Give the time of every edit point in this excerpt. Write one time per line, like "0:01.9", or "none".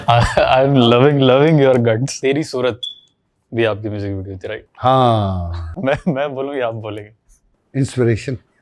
0:02.1